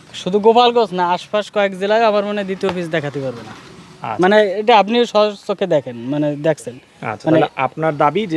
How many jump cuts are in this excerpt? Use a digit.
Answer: 0